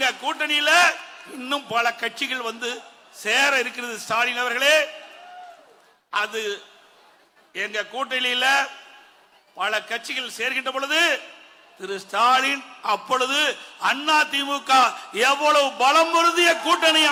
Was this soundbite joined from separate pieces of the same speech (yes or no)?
no